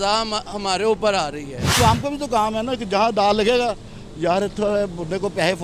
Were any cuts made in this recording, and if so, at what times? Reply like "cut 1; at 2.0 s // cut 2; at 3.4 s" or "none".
cut 1; at 1.8 s